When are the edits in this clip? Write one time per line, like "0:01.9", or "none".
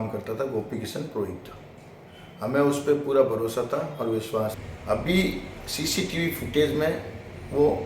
0:04.7